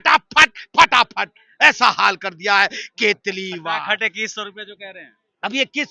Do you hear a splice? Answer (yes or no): no